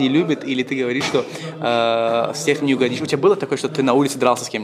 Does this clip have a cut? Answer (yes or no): no